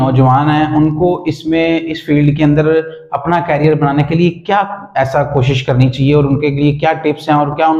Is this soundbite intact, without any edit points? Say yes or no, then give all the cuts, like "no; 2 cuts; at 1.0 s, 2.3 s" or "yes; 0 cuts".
yes; 0 cuts